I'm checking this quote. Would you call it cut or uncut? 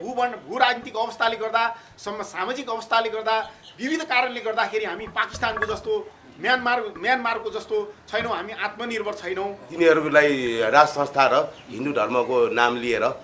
cut